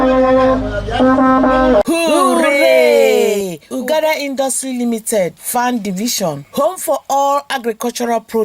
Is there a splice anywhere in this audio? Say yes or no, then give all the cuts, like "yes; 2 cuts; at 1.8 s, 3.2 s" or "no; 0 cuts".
yes; 1 cut; at 2.2 s